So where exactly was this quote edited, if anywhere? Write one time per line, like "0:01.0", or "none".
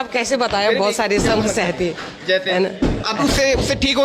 0:03.0